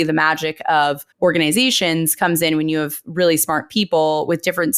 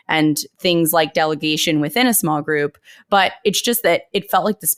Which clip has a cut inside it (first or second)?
first